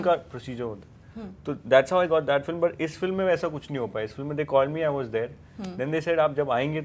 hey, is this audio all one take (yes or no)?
yes